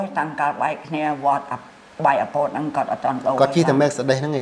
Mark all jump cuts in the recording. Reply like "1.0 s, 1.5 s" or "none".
none